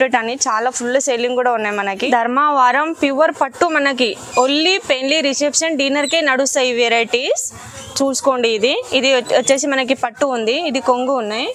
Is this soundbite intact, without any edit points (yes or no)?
no